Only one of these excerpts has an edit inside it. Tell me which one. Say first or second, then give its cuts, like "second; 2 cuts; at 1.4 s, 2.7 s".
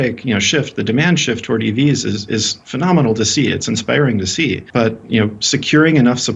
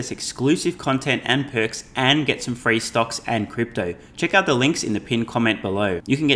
first; 1 cut; at 4.6 s